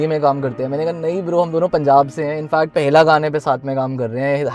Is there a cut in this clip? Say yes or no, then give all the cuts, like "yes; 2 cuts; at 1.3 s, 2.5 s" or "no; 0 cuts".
yes; 1 cut; at 2.7 s